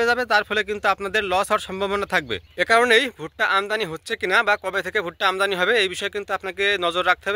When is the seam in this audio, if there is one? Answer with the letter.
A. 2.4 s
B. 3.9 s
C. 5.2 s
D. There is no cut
A